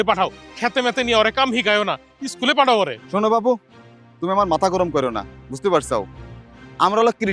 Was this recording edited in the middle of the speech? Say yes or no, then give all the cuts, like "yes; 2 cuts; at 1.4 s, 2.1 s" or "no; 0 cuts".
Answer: no; 0 cuts